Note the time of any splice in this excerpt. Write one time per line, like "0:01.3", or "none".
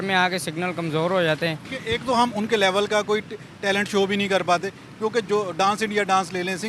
0:01.7